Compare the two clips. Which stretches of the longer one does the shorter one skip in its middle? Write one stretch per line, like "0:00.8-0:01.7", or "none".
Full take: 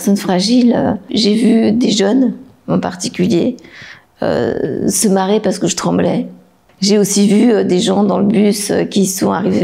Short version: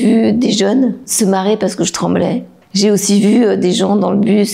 0:02.5-0:05.0
0:06.4-0:06.6